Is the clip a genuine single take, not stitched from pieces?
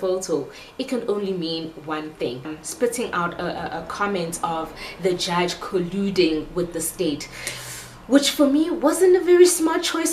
no; 1 cut; at 2.6 s

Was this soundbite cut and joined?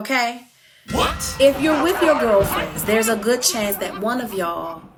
no; 0 cuts

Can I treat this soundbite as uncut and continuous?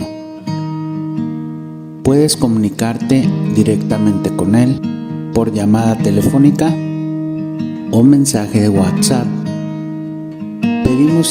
yes; 0 cuts

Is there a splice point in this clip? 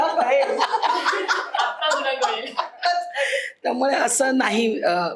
no; 0 cuts

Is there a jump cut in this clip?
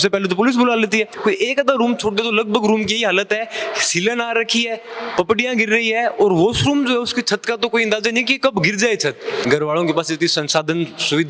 yes; 2 cuts; at 1.1 s, 9.4 s

